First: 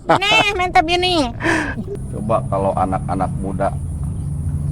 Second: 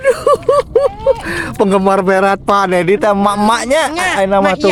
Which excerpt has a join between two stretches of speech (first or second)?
first